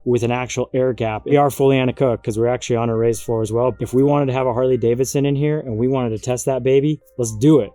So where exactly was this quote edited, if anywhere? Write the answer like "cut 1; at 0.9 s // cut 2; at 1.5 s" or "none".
cut 1; at 1.3 s // cut 2; at 3.8 s

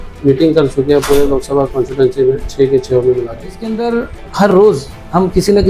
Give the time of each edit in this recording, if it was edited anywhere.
cut 1; at 3.8 s

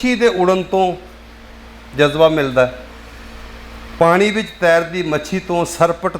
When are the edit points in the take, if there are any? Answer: none

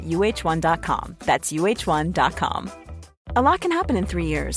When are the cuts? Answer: none

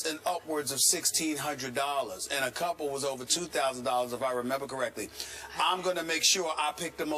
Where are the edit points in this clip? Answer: cut 1; at 3.0 s

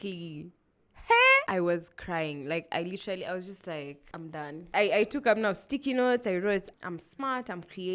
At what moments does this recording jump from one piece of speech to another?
cut 1; at 1.5 s // cut 2; at 4.6 s

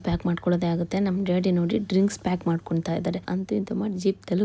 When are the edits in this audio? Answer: cut 1; at 3.3 s

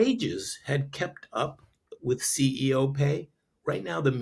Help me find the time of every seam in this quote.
none

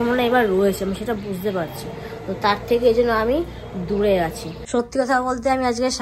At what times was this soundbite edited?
cut 1; at 4.7 s

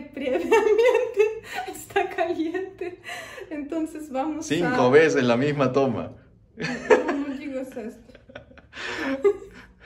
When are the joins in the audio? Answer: none

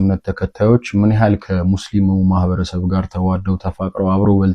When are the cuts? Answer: none

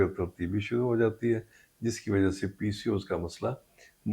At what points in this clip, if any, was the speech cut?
none

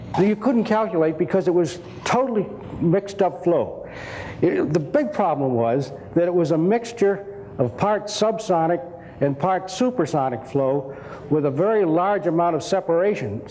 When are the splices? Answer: none

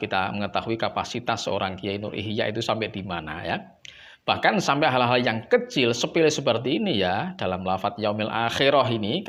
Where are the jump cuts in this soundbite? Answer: none

